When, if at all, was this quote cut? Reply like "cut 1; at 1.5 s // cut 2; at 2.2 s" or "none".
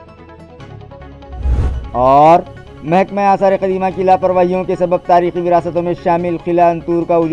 cut 1; at 1.8 s